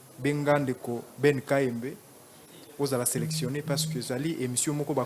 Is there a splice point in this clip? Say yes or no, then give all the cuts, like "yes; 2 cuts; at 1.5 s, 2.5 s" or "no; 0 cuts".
no; 0 cuts